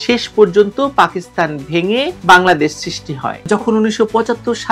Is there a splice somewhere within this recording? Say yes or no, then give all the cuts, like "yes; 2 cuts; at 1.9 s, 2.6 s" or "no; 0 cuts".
yes; 1 cut; at 3.3 s